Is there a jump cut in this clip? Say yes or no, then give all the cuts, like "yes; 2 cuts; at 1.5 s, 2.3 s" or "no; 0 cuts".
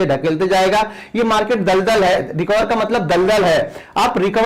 no; 0 cuts